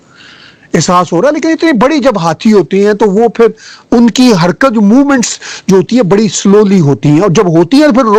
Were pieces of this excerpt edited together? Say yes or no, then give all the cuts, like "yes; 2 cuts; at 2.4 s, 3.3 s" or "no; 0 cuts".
no; 0 cuts